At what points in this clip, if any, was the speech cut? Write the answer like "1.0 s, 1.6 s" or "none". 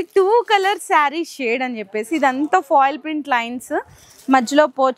none